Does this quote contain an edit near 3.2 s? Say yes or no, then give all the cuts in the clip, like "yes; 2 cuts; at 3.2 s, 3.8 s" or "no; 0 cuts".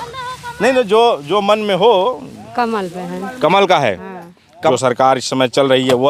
no; 1 cut; at 4.7 s